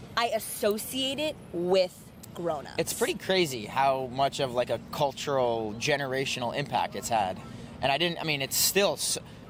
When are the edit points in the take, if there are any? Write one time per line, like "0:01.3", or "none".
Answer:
none